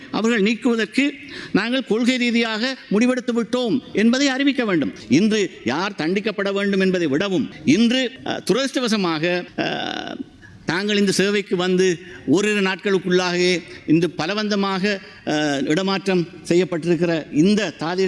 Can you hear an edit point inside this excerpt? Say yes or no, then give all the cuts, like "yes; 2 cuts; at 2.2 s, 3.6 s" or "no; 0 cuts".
yes; 1 cut; at 5.0 s